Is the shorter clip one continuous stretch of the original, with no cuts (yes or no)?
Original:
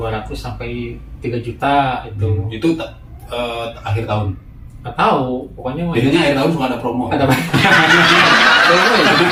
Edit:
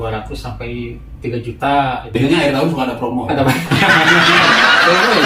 no